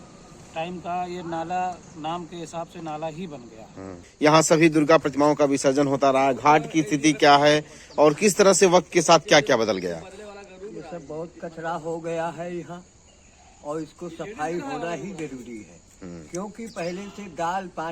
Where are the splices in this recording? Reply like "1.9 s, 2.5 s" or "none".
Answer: 4.1 s